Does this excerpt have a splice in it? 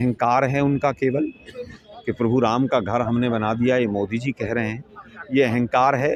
no; 0 cuts

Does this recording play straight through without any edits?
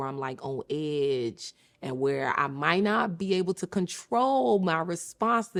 yes; 0 cuts

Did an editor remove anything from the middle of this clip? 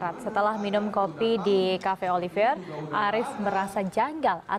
no; 0 cuts

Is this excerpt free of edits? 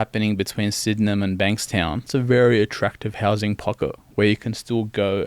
no; 1 cut; at 2.1 s

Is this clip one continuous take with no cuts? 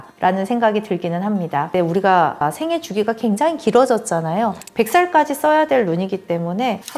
no; 1 cut; at 1.7 s

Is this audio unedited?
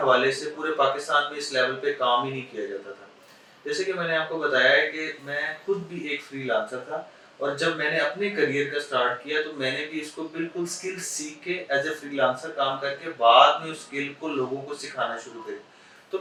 yes; 0 cuts

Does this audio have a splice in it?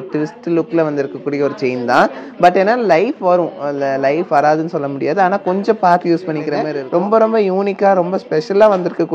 yes; 1 cut; at 6.7 s

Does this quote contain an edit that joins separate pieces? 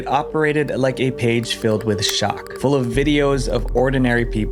no; 0 cuts

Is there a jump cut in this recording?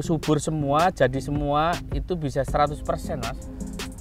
no; 0 cuts

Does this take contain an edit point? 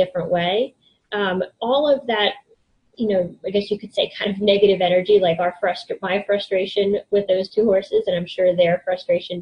no; 0 cuts

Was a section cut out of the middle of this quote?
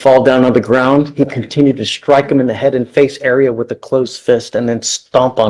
no; 0 cuts

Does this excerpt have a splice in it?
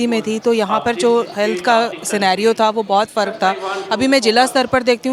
no; 0 cuts

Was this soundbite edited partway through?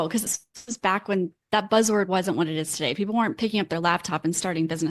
no; 0 cuts

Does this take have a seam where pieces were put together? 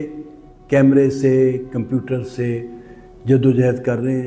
no; 0 cuts

